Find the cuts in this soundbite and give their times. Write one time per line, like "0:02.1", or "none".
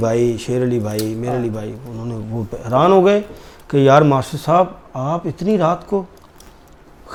none